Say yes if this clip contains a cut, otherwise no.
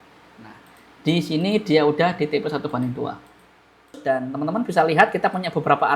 yes